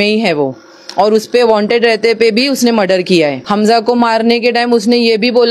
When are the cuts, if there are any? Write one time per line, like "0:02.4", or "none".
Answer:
0:03.4